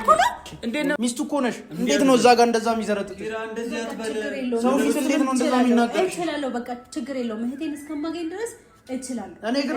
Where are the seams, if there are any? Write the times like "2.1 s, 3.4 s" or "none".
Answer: 1.0 s